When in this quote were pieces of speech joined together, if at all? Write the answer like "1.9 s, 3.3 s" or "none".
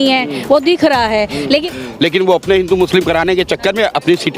1.5 s